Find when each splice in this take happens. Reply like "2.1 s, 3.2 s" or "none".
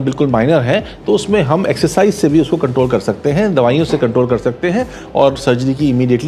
none